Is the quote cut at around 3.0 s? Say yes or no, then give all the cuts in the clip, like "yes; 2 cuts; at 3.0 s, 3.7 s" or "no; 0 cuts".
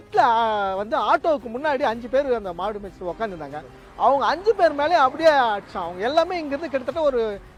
no; 0 cuts